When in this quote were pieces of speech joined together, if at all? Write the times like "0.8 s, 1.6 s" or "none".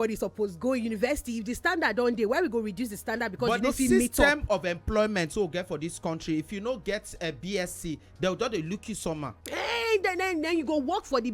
none